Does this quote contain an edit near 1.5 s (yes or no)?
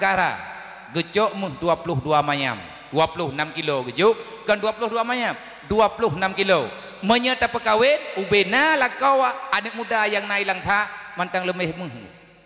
no